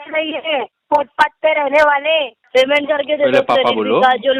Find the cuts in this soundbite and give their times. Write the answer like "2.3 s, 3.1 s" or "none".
2.4 s